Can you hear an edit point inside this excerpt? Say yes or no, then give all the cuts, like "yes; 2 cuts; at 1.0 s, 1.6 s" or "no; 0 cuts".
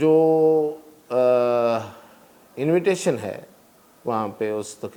no; 0 cuts